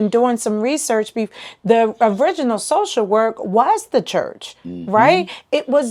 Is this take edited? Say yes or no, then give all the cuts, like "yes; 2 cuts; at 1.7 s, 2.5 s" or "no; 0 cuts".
no; 0 cuts